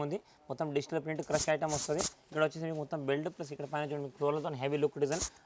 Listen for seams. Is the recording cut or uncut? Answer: uncut